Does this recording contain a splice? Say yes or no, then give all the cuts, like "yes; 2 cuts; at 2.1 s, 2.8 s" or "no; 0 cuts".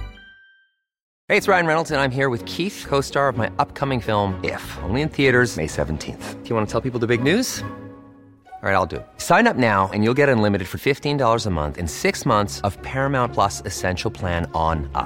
yes; 1 cut; at 1.1 s